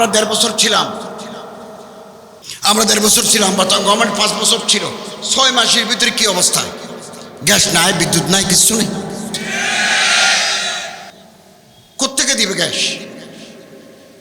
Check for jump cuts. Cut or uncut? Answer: cut